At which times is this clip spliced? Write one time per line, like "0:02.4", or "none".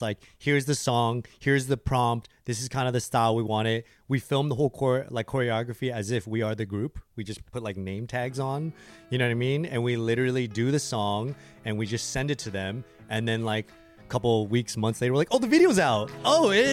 none

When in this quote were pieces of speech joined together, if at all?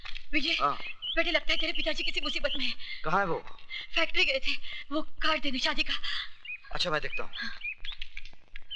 none

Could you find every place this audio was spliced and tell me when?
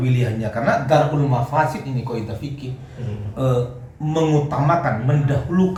none

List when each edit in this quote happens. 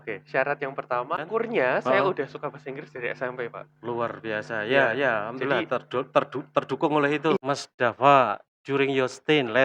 0:01.2
0:07.4

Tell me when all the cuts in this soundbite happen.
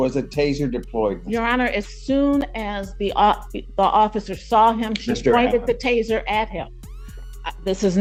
none

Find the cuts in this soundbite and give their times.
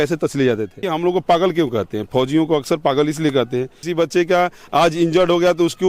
0:00.9
0:03.8

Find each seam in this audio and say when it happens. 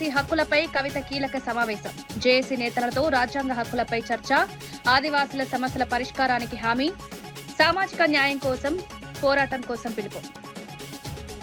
none

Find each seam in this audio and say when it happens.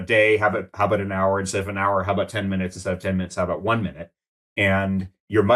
none

